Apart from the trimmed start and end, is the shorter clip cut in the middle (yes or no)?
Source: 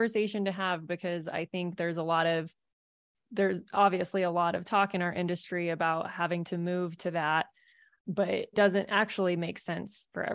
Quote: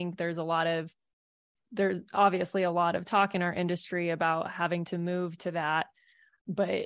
no